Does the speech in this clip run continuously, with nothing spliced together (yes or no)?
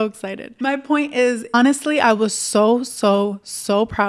no